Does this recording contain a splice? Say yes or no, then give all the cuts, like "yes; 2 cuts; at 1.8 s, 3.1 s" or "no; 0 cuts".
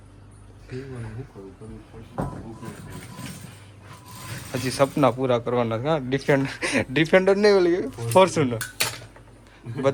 no; 0 cuts